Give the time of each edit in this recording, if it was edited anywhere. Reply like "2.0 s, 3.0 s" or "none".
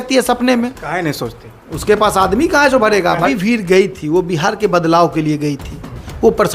3.2 s